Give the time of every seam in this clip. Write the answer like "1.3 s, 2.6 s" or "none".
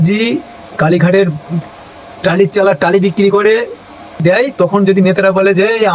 4.2 s